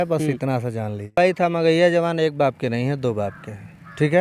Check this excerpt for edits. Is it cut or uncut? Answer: cut